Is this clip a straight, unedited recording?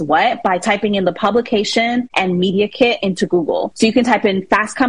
no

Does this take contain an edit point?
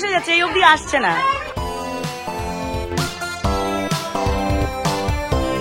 no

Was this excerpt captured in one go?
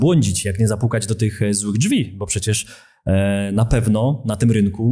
yes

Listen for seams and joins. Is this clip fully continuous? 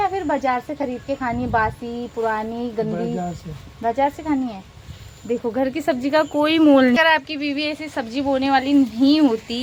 yes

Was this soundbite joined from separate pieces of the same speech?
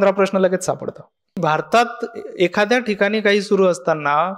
yes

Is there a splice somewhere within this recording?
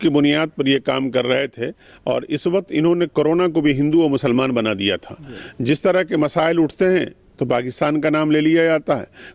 no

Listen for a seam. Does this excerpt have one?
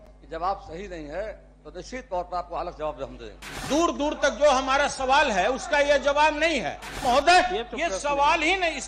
yes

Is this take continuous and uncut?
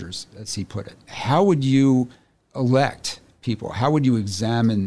no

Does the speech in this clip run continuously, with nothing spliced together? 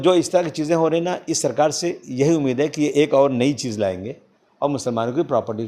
yes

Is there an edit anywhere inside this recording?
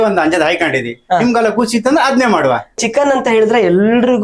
yes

